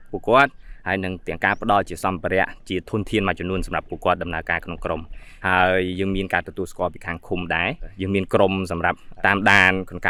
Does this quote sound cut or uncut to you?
uncut